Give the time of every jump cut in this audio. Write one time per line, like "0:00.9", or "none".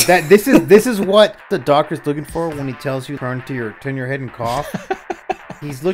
0:01.6
0:03.2
0:04.7